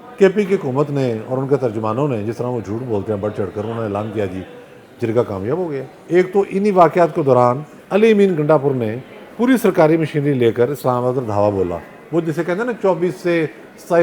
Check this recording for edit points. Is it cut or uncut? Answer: cut